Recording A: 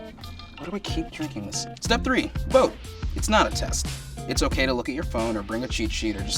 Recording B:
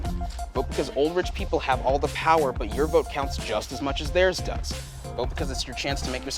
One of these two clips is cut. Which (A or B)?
A